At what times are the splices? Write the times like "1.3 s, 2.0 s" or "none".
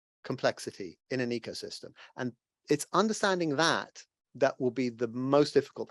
0.9 s